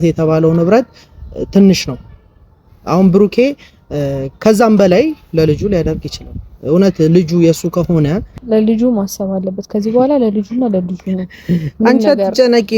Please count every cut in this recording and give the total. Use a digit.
1